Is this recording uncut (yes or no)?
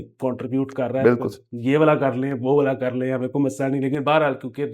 no